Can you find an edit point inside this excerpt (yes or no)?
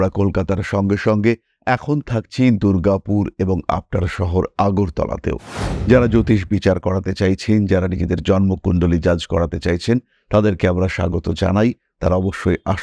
no